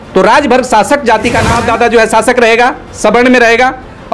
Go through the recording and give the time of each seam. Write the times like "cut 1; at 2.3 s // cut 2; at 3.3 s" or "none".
cut 1; at 1.5 s